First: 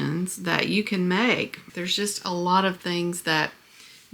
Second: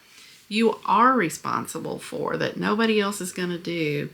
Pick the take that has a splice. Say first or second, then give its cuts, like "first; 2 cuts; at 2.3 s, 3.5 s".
first; 1 cut; at 1.6 s